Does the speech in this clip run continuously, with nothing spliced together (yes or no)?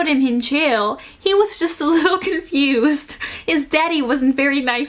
yes